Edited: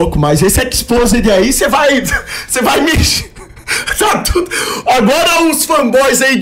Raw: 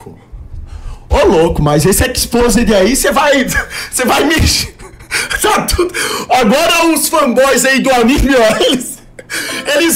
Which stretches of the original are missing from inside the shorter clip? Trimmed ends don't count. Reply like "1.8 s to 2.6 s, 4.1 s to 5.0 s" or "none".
none

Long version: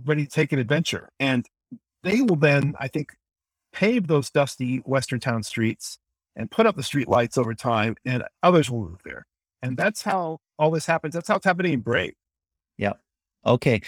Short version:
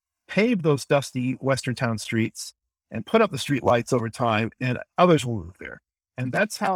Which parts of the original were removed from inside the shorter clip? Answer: none

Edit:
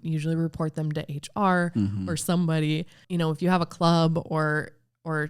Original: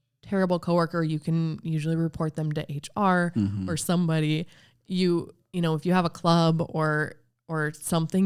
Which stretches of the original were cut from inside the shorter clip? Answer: 4.6 s to 5.4 s

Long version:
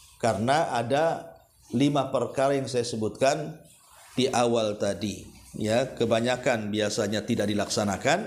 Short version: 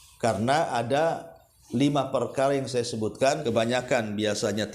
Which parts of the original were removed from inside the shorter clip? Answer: 3.4 s to 6.0 s

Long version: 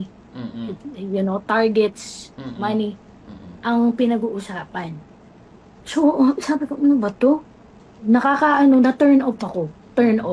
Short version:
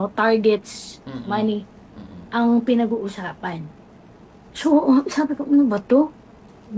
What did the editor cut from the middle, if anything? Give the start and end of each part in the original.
none

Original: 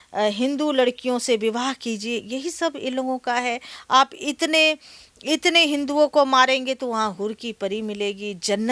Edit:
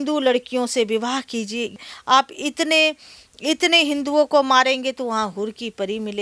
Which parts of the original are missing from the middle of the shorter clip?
2.3 s to 3.6 s

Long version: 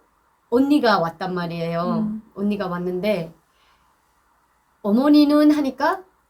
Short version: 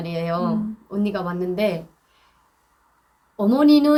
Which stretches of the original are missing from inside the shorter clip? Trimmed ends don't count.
none

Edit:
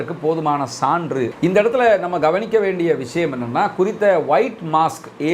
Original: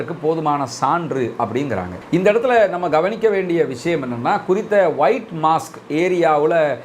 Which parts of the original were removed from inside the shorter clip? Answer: 1.3 s to 2.0 s

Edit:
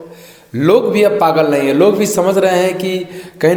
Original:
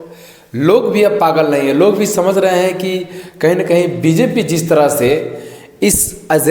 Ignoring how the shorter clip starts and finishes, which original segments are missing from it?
none

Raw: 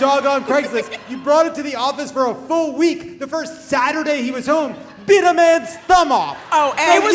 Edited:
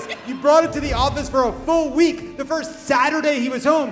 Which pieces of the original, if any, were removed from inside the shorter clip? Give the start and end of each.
none

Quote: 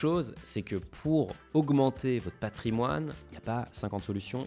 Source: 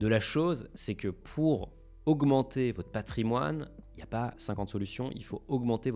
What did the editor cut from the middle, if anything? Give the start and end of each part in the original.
1.7 s to 1.9 s, 3.8 s to 3.9 s

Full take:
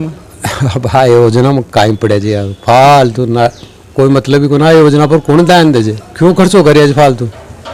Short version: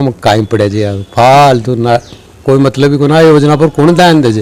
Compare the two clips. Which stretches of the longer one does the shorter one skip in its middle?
none

